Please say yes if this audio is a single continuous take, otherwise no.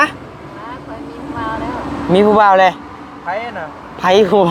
yes